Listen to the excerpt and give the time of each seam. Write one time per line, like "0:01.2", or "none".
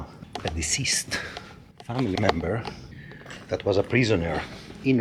none